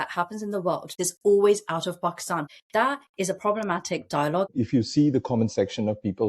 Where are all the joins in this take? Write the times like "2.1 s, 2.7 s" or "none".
0.9 s, 2.4 s, 4.5 s